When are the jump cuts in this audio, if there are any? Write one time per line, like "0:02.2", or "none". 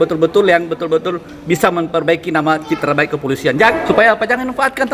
0:03.7

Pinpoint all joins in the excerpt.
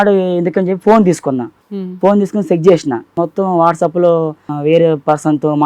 0:01.5
0:03.2
0:04.5

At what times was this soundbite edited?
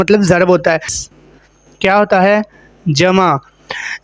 0:01.0

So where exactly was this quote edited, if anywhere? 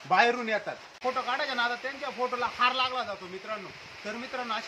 0:00.9

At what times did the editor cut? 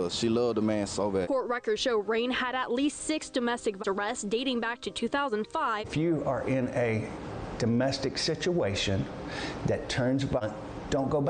0:01.2
0:03.8
0:05.9
0:10.4

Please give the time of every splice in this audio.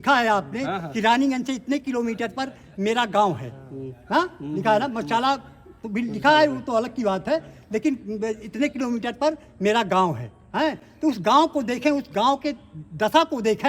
none

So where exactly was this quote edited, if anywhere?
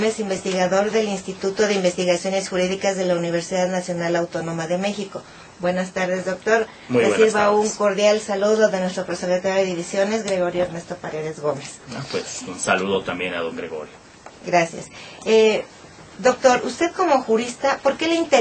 none

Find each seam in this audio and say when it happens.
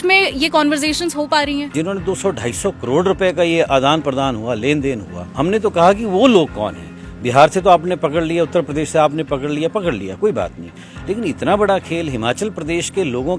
0:01.7
0:05.2

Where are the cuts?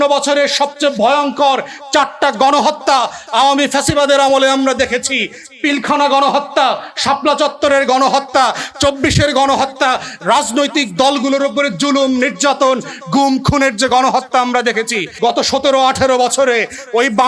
0:15.0

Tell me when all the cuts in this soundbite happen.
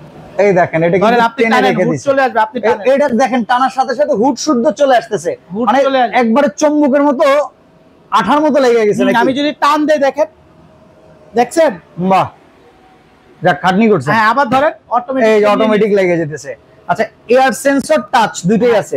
none

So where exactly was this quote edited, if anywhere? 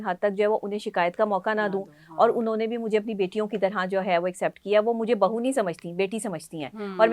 none

